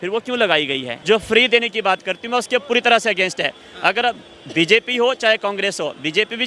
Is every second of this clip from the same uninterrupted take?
no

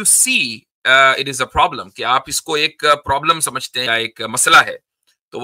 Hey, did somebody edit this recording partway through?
yes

